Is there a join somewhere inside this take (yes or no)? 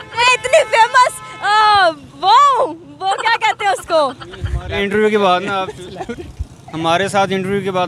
no